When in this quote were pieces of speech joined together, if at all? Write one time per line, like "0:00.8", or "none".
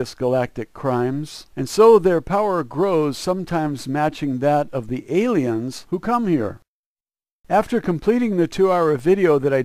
0:05.7